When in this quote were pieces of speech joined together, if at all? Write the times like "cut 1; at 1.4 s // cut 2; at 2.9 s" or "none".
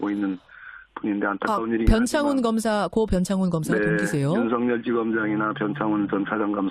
none